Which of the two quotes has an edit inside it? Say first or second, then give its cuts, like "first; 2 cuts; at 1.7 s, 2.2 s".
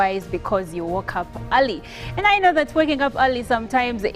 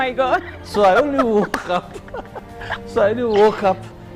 first; 1 cut; at 2.0 s